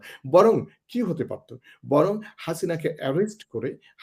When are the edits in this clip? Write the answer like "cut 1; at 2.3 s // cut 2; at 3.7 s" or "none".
none